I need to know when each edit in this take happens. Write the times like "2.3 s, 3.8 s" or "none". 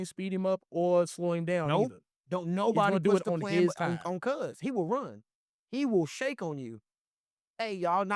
none